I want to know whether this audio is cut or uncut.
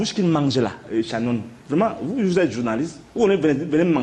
uncut